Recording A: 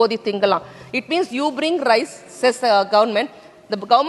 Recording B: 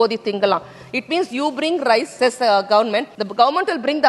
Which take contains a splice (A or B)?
B